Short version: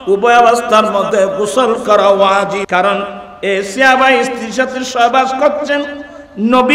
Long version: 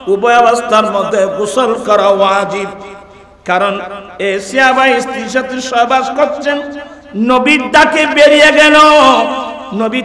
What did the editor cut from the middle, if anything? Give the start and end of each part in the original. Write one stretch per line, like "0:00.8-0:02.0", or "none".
0:02.7-0:03.4